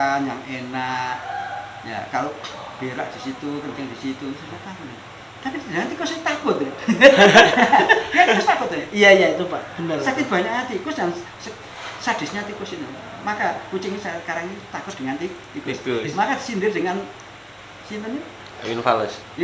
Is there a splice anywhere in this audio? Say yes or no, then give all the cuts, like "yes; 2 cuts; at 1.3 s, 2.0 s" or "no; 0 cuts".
no; 0 cuts